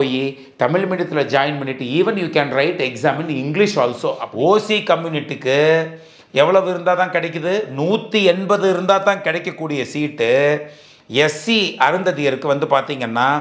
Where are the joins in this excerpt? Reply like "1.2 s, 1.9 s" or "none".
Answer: 4.2 s